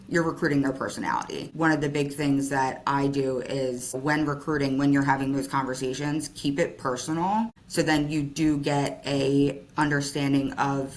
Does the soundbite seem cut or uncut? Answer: cut